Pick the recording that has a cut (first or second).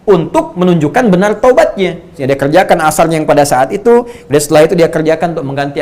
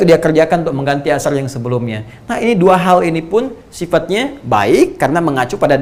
first